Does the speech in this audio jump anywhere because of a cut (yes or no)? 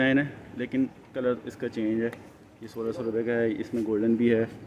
no